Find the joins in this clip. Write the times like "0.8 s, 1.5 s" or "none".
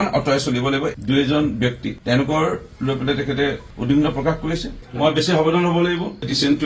1.0 s, 1.9 s, 4.8 s